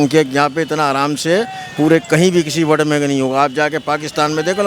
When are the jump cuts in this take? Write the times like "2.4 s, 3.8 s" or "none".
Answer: none